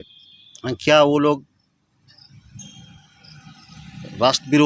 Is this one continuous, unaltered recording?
yes; 0 cuts

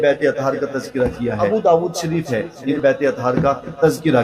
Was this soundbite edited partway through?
yes; 2 cuts; at 1.4 s, 2.8 s

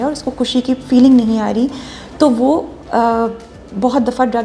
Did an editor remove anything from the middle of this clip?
no; 0 cuts

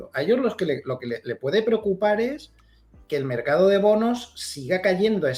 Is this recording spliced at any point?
no; 0 cuts

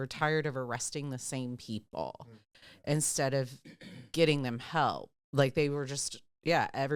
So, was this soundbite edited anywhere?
no; 0 cuts

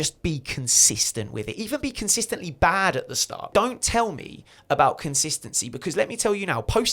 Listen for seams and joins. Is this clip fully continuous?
no; 1 cut; at 3.5 s

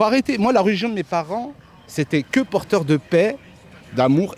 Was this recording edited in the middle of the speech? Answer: no; 0 cuts

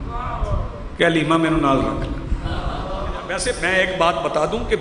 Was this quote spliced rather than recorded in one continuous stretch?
yes; 1 cut; at 3.3 s

